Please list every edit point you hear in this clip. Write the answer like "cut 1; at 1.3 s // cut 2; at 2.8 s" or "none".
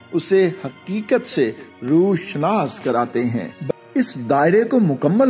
cut 1; at 3.6 s